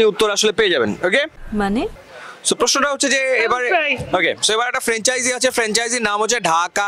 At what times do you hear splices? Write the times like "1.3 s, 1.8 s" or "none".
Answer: none